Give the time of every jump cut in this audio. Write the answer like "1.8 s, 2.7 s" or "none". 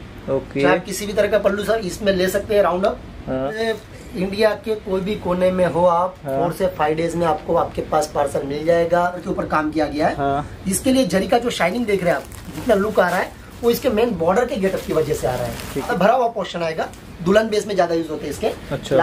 3.5 s, 9.2 s, 15.9 s

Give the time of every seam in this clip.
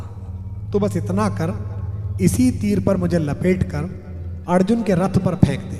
none

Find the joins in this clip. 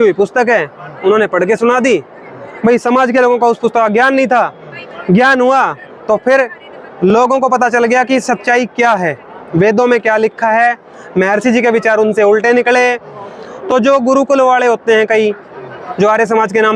none

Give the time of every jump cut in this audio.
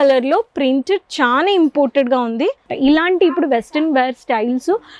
2.7 s

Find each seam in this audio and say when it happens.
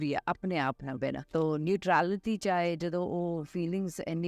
1.3 s

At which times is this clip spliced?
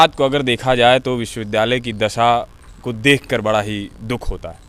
none

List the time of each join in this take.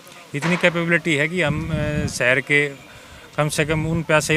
none

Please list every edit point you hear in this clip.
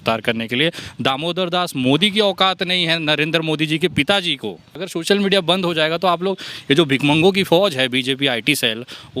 4.7 s

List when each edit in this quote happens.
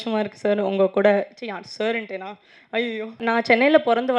3.2 s

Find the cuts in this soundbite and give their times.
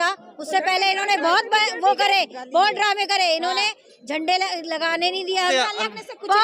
5.5 s

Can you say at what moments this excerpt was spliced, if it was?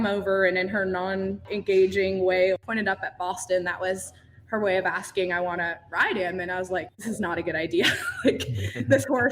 1.5 s, 2.6 s, 6.9 s

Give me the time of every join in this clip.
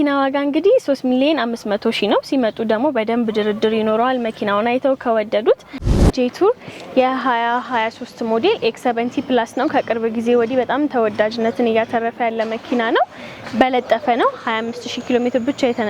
6.0 s

